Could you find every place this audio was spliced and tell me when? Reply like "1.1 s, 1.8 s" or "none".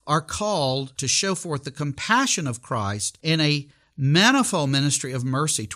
1.0 s, 3.1 s